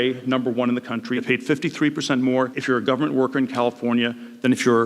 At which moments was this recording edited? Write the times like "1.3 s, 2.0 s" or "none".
1.2 s, 2.6 s